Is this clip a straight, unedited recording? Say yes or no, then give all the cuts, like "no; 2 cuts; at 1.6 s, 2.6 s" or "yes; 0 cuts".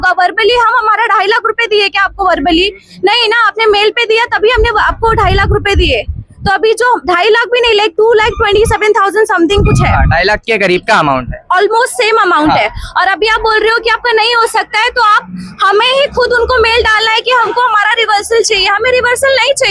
yes; 0 cuts